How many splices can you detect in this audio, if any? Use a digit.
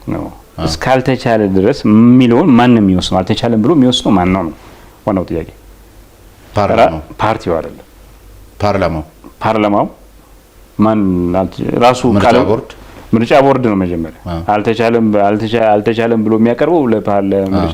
0